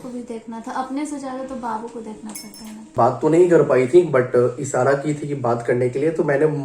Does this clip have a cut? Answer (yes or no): yes